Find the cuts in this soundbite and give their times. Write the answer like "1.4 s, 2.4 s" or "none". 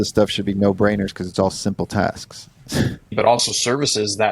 3.1 s